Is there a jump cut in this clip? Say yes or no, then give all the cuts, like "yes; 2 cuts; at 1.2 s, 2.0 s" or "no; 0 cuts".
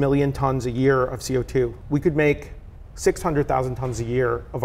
yes; 1 cut; at 1.8 s